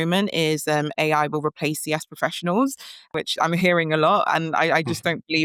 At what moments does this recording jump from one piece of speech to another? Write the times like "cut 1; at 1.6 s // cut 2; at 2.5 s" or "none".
none